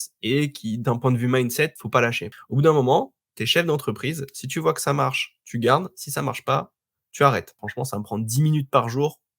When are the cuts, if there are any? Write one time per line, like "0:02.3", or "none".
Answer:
0:02.0
0:07.6